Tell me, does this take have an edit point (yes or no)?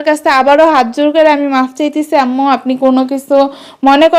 no